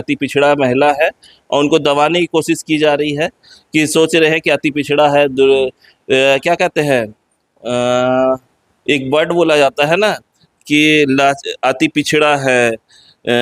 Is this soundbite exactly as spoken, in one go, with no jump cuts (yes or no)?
yes